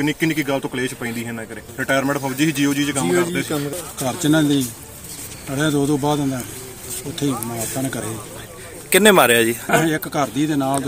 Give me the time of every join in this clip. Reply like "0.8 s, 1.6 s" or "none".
1.7 s, 3.7 s, 9.7 s